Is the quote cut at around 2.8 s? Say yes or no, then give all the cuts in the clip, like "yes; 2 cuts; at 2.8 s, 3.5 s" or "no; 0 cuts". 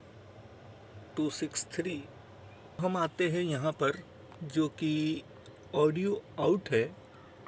yes; 1 cut; at 2.8 s